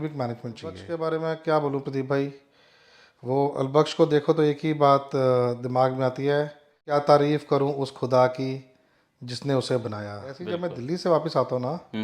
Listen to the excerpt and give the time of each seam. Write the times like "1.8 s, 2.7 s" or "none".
0.8 s, 6.9 s, 10.4 s